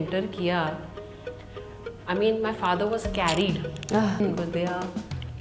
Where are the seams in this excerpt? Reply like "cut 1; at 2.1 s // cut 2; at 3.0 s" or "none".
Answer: cut 1; at 4.2 s